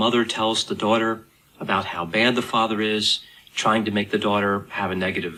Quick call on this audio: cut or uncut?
uncut